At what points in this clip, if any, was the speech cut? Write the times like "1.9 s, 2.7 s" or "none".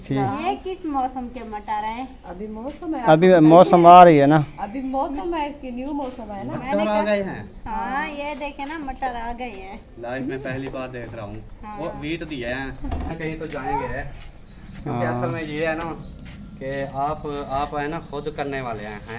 13.2 s